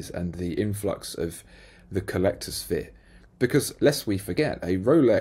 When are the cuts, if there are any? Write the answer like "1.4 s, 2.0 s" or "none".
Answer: none